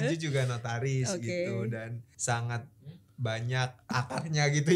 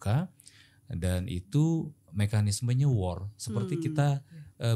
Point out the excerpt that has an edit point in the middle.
first; 2 cuts; at 2.1 s, 3.9 s

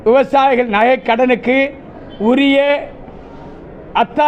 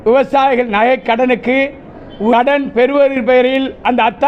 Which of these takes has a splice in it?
second; 1 cut; at 2.3 s

